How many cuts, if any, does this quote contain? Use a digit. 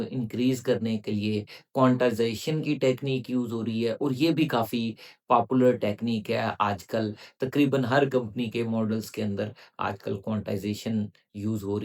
0